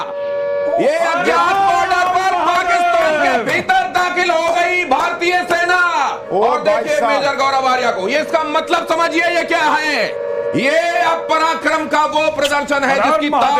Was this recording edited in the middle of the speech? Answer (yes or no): no